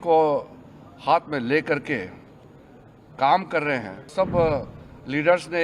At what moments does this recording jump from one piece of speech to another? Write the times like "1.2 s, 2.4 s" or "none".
4.1 s